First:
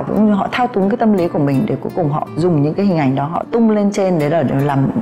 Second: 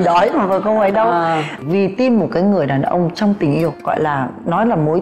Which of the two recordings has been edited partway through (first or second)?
second